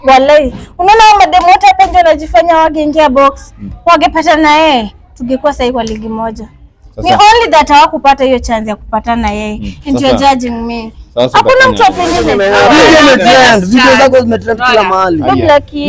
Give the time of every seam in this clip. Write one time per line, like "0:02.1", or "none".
0:12.3